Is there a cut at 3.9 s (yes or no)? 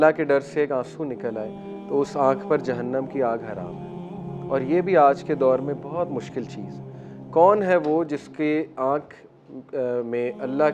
no